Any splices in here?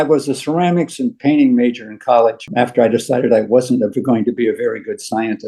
yes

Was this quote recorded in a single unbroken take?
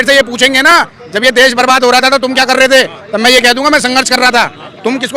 yes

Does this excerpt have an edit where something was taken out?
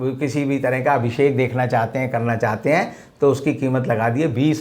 no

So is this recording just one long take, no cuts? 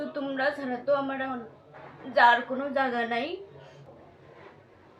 yes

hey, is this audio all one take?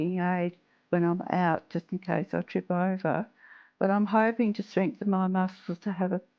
yes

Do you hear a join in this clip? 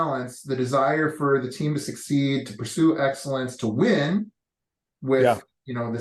no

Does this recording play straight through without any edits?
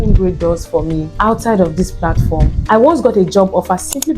no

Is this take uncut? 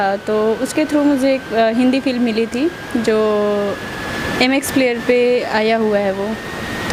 yes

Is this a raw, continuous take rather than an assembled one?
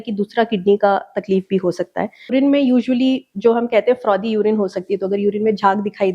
no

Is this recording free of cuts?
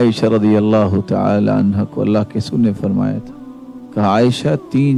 yes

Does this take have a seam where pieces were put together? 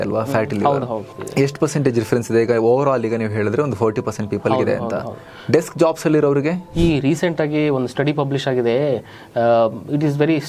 yes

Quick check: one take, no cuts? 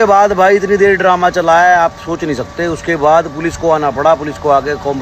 yes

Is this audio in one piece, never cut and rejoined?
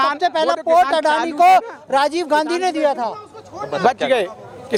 yes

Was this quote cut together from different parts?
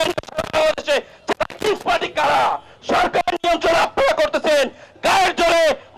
yes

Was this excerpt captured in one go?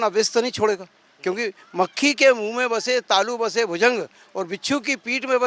yes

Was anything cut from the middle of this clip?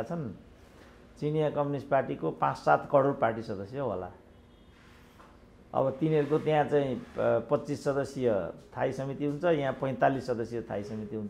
no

